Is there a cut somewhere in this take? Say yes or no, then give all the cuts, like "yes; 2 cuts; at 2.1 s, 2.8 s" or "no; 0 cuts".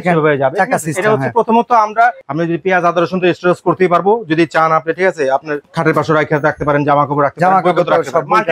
yes; 2 cuts; at 2.3 s, 5.7 s